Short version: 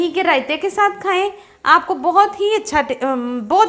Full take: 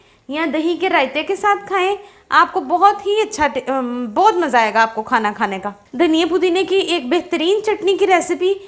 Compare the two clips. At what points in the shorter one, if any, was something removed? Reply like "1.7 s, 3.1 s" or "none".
none